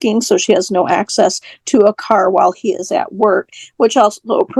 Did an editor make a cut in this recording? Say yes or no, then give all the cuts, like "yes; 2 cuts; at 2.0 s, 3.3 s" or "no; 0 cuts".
no; 0 cuts